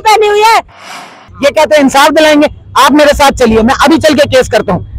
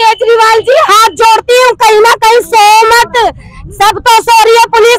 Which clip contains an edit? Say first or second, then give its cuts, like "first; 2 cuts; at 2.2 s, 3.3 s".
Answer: first; 1 cut; at 1.1 s